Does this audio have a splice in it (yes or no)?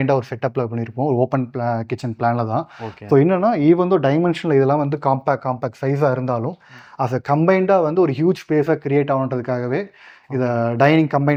no